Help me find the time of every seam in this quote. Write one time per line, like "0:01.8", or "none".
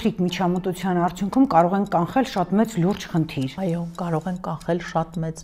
none